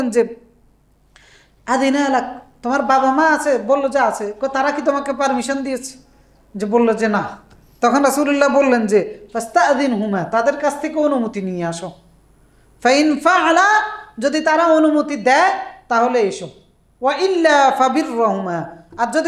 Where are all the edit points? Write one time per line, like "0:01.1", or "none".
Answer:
none